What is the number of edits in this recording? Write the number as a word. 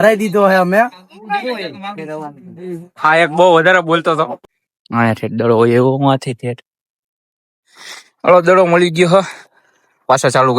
one